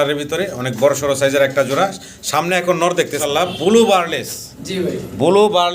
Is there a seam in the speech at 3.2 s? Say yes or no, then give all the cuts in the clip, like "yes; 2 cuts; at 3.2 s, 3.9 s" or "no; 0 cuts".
yes; 1 cut; at 3.2 s